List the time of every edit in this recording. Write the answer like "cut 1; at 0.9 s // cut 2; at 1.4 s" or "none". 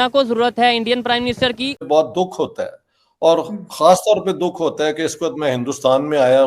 cut 1; at 1.8 s